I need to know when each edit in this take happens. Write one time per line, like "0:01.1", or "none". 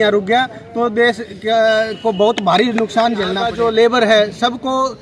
0:03.4